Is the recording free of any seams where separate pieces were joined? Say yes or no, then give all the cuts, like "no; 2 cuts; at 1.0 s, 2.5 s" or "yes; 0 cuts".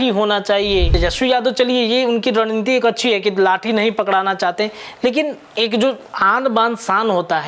no; 1 cut; at 0.9 s